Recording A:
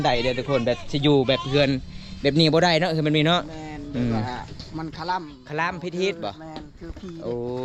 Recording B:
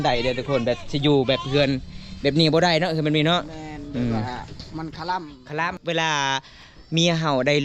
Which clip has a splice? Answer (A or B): B